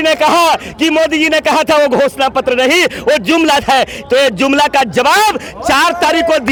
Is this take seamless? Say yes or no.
yes